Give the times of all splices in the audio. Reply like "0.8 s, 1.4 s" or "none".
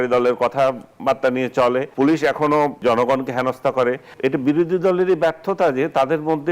1.9 s, 2.8 s, 4.1 s